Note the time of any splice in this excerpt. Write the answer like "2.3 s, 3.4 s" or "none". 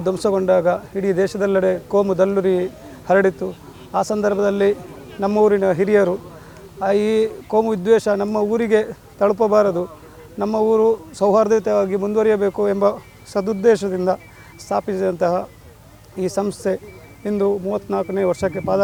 none